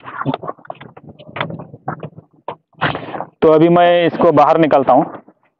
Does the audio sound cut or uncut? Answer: uncut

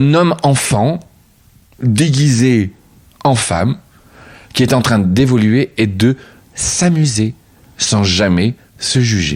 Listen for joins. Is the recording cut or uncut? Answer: uncut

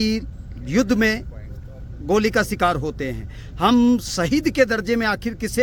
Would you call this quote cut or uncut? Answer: uncut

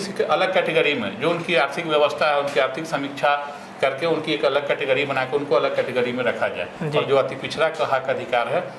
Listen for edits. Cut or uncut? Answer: uncut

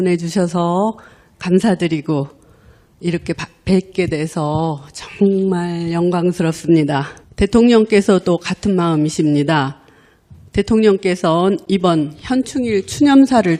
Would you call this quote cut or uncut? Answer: uncut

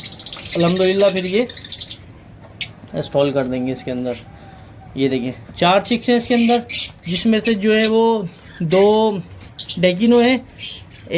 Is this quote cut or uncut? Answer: uncut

